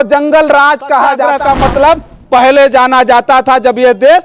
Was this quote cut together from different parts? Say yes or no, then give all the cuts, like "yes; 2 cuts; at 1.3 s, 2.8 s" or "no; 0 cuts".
yes; 1 cut; at 1.3 s